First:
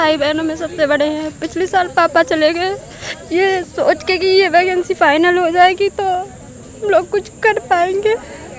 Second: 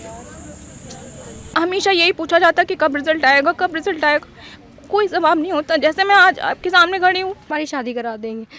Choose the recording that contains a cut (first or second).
second